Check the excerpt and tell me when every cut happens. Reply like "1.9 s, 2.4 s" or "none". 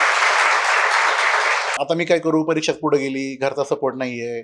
1.8 s